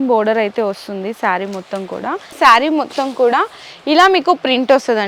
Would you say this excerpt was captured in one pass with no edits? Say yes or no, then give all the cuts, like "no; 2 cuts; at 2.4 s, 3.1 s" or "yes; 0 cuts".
no; 1 cut; at 2.3 s